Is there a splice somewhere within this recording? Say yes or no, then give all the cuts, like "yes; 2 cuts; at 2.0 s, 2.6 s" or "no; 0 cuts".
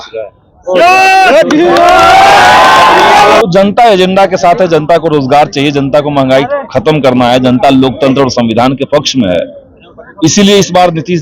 yes; 1 cut; at 3.4 s